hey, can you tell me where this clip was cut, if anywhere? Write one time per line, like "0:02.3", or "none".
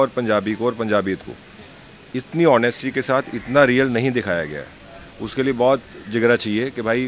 none